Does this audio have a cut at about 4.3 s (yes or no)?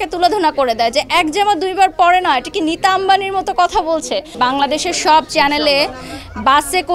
yes